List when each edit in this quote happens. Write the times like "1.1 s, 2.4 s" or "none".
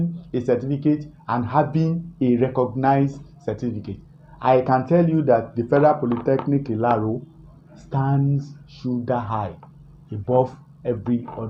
none